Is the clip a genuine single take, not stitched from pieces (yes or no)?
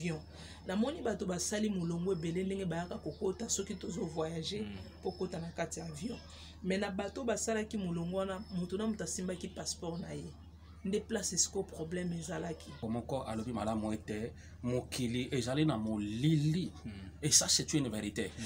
no